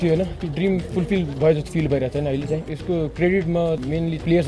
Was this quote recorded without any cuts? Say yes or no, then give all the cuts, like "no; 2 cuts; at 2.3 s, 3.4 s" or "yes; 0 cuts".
yes; 0 cuts